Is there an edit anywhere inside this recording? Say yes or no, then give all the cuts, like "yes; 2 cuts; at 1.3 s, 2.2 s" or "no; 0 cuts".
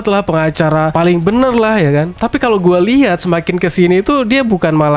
yes; 1 cut; at 0.9 s